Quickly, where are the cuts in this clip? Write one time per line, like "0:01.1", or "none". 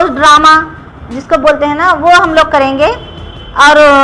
none